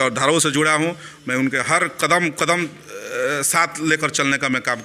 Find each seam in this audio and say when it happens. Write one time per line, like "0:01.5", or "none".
none

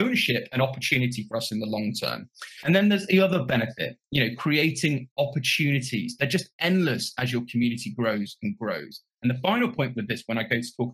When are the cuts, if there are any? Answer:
none

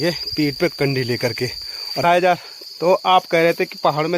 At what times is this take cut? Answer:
0:02.0

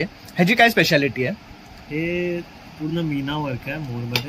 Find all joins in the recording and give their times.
none

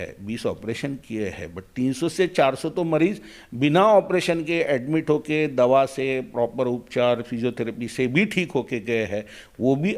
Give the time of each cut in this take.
none

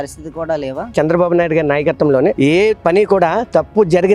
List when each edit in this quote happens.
0:00.9

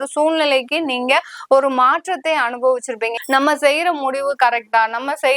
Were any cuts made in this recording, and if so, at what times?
0:03.1

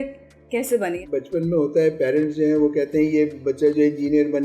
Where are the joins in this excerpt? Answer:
0:01.0

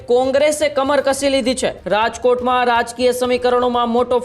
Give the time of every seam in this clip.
0:01.7

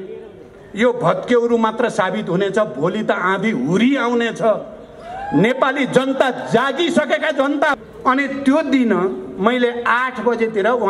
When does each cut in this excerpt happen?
0:07.7

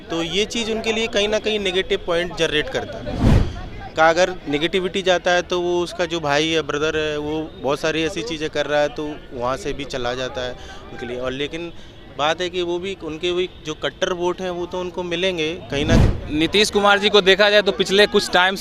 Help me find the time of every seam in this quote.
0:03.4
0:16.0

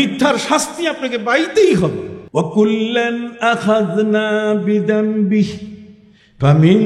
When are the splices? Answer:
0:02.1

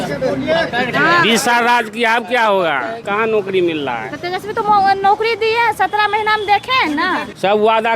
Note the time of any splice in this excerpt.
0:03.0

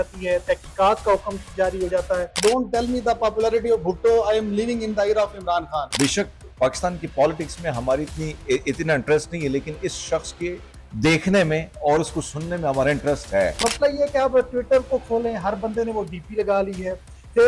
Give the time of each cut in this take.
0:02.3
0:05.9
0:13.6

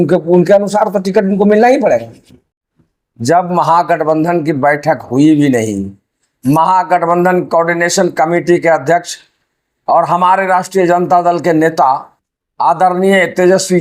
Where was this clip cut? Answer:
0:02.5

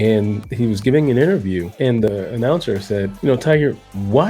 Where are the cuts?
0:01.7

